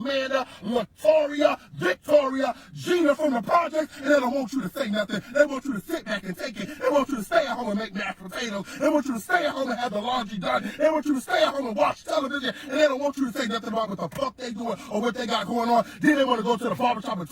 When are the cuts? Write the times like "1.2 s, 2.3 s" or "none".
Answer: 5.3 s, 7.9 s, 11.2 s